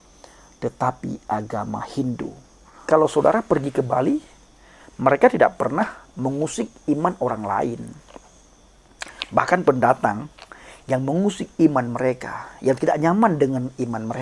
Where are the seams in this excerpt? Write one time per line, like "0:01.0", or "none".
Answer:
0:02.8